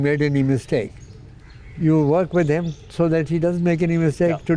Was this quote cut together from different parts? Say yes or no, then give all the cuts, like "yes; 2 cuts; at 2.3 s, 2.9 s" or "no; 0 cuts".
no; 0 cuts